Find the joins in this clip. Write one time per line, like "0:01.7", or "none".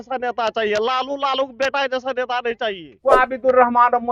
0:02.9